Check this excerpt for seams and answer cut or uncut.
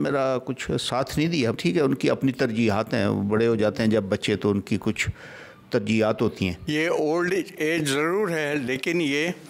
cut